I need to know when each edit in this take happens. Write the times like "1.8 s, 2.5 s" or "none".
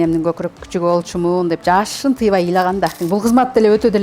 3.0 s

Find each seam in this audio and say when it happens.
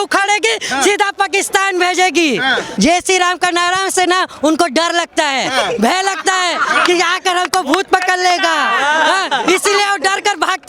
2.7 s

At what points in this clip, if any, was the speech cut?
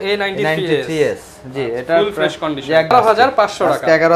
2.9 s

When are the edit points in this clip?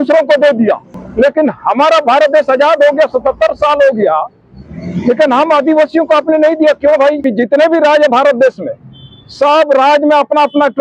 1.0 s, 7.2 s

